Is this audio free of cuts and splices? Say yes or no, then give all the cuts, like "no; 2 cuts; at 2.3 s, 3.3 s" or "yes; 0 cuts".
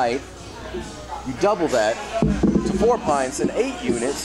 yes; 0 cuts